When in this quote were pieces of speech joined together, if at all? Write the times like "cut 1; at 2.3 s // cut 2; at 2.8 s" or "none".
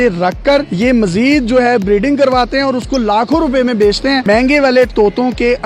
cut 1; at 4.2 s